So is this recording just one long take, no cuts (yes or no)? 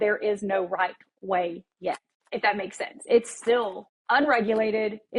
yes